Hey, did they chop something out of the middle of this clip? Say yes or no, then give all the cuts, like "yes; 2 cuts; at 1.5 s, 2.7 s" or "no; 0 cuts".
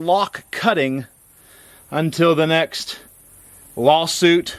no; 0 cuts